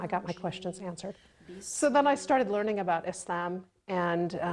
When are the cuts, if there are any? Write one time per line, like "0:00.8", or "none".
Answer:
0:01.7